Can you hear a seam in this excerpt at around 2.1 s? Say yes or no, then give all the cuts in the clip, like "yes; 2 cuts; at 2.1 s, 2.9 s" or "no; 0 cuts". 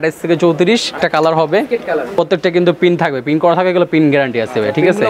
yes; 2 cuts; at 1.0 s, 2.1 s